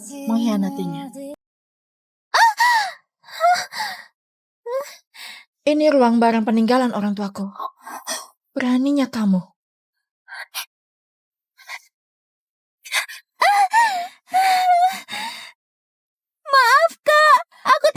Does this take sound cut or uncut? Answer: cut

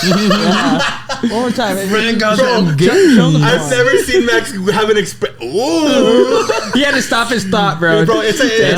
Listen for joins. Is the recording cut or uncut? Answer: uncut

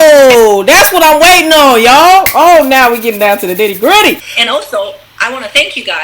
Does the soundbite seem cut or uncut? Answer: cut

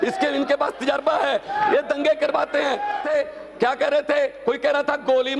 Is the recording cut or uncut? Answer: cut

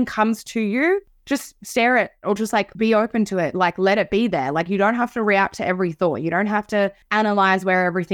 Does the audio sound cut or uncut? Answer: cut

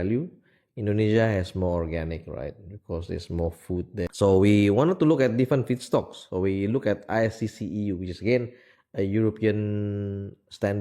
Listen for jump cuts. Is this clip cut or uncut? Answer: cut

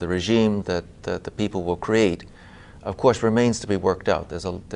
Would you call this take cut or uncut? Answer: uncut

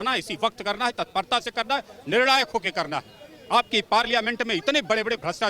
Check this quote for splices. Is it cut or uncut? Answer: uncut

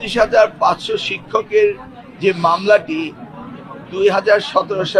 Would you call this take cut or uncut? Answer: uncut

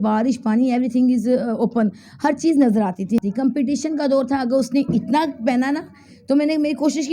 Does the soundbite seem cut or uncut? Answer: cut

